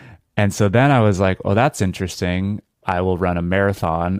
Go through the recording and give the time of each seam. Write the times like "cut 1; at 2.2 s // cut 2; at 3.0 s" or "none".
cut 1; at 2.8 s